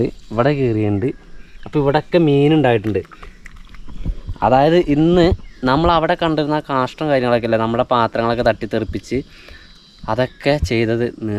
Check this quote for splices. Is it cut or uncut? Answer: uncut